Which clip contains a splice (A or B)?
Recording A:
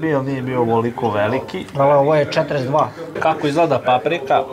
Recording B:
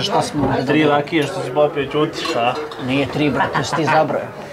A